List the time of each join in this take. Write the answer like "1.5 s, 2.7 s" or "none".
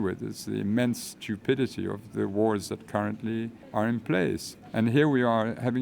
3.6 s, 4.5 s